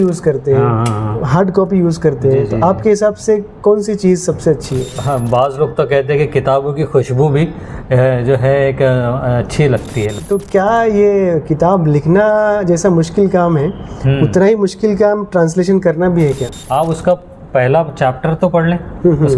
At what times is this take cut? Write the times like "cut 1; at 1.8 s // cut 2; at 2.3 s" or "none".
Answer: cut 1; at 4.9 s // cut 2; at 10.1 s // cut 3; at 16.5 s